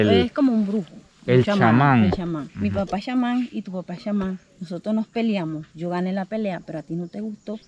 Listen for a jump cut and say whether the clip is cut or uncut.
uncut